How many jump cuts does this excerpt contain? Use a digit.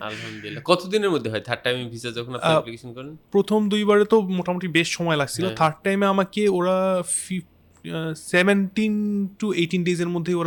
0